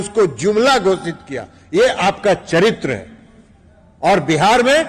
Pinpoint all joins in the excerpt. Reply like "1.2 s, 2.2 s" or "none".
none